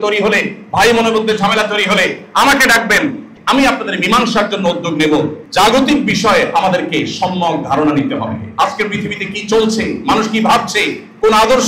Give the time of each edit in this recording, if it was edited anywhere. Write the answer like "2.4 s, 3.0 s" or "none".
3.3 s, 5.4 s